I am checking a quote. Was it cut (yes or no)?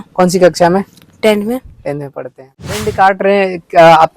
yes